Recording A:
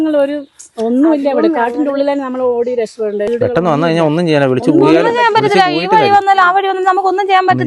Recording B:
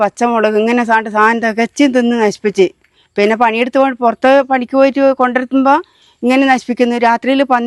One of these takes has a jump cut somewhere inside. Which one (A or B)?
A